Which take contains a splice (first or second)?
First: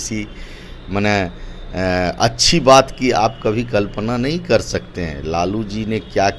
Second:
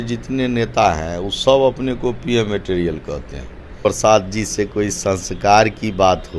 second